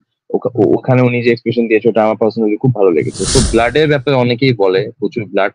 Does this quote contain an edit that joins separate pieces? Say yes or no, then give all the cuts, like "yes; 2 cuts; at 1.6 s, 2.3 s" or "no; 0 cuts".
yes; 1 cut; at 3.3 s